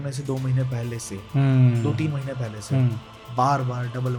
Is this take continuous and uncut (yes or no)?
yes